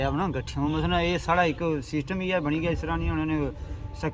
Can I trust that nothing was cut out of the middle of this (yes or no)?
yes